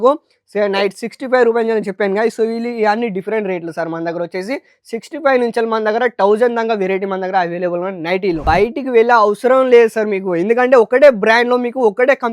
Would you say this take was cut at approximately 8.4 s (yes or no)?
yes